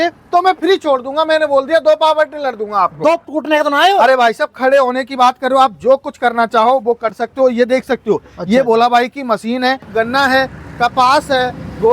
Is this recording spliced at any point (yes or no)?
yes